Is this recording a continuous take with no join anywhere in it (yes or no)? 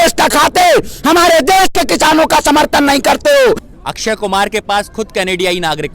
no